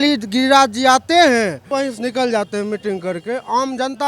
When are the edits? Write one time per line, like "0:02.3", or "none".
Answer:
0:01.7